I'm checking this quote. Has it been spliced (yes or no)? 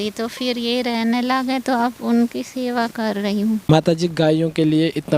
yes